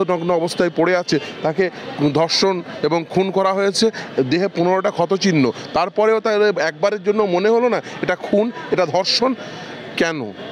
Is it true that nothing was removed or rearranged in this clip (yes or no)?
yes